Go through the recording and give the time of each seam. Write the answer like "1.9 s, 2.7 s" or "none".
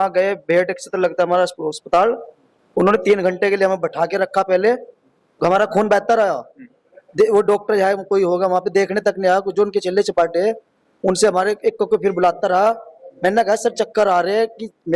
none